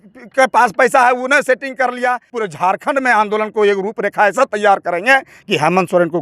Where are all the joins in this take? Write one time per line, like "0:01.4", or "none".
0:02.3